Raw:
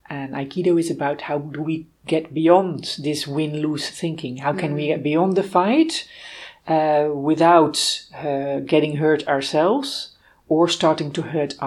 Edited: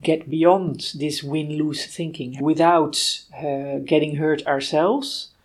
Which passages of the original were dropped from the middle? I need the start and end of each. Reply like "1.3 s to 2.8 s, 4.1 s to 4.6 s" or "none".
4.4 s to 7.2 s